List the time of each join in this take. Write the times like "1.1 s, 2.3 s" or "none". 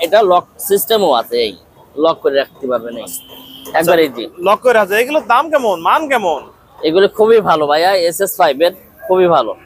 none